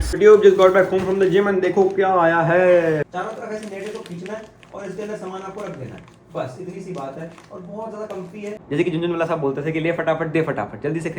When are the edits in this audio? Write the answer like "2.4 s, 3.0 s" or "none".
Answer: 3.2 s, 8.6 s